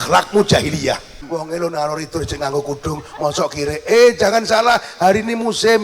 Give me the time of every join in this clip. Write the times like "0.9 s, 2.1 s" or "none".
1.2 s